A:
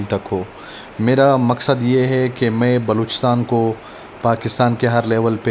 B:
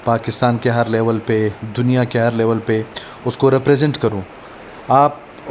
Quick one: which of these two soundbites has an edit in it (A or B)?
B